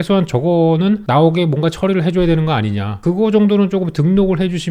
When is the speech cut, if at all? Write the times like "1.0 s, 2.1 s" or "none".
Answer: none

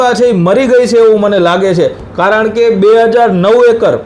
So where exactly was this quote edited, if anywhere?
none

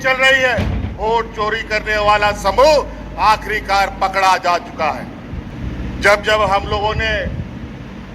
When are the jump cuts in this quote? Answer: 1.0 s, 5.5 s

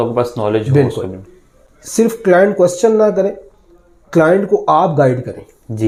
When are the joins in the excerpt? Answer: none

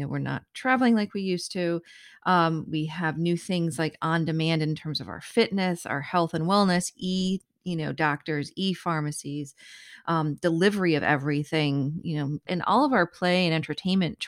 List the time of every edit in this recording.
12.5 s

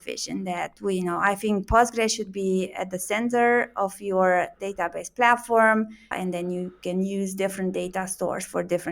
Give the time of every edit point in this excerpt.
6.1 s

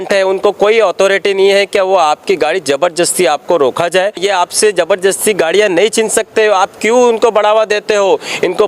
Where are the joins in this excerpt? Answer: 4.2 s

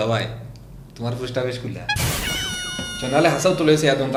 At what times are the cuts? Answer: none

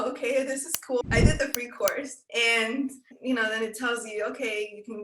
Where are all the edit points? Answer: 1.0 s, 2.2 s

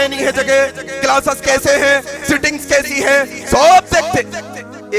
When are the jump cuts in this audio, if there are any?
none

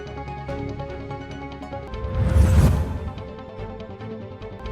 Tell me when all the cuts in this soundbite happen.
1.9 s

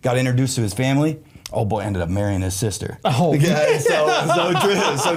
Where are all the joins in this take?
none

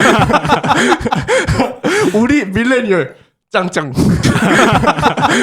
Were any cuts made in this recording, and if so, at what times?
4.2 s

